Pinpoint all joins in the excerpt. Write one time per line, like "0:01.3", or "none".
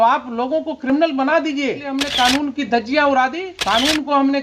0:02.0
0:03.5